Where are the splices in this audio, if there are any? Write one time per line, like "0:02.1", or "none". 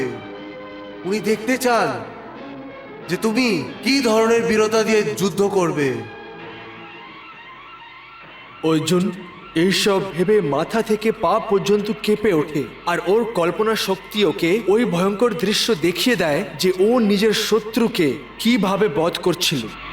none